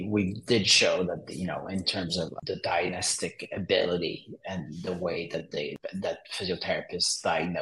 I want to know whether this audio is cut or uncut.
cut